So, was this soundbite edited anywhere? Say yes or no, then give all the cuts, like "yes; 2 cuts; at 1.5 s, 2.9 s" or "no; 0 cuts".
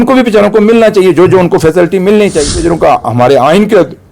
yes; 1 cut; at 2.5 s